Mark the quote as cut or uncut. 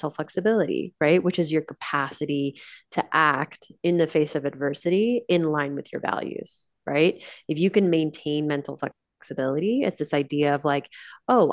uncut